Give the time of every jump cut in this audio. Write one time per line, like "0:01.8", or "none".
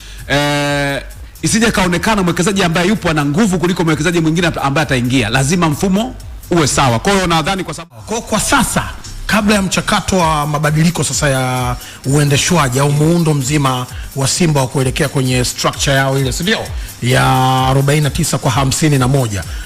0:07.9